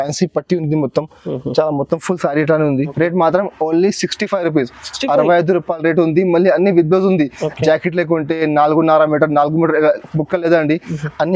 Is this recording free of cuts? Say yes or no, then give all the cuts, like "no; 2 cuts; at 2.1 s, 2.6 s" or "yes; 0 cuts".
no; 1 cut; at 2.9 s